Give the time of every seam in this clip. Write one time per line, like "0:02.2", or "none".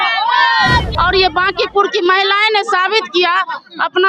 0:00.9